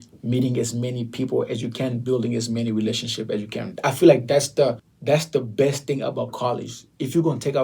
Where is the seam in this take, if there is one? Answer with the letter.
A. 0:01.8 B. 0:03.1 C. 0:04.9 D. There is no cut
C